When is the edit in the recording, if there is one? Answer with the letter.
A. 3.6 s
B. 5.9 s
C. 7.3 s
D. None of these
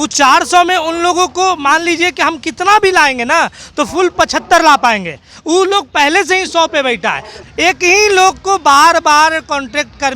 C